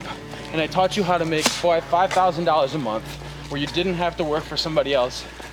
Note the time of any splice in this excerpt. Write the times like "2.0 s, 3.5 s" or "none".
none